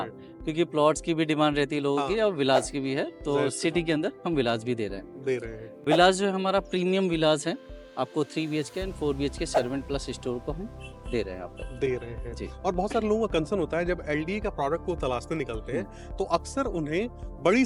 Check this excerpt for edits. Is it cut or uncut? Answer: uncut